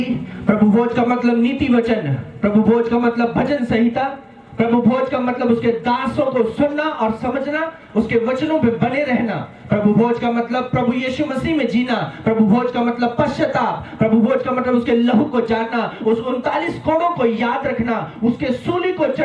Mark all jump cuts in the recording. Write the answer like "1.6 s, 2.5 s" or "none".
none